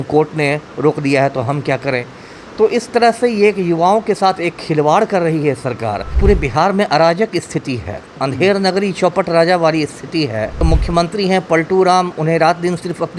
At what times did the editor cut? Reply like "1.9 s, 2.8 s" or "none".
6.1 s, 10.6 s